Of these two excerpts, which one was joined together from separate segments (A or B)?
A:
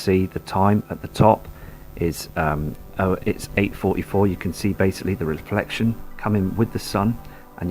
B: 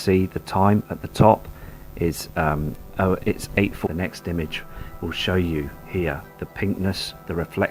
A